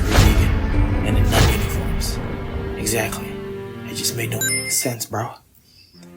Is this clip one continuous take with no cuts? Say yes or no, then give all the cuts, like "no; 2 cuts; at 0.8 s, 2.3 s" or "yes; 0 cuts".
no; 1 cut; at 4.4 s